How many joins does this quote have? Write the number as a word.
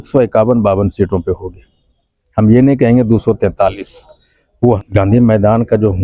one